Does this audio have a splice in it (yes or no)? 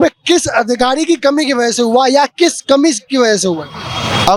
no